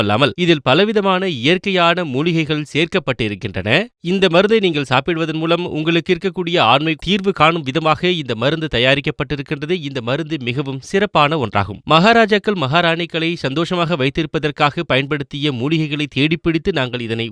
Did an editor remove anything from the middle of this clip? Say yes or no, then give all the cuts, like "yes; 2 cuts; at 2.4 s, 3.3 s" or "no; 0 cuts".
no; 0 cuts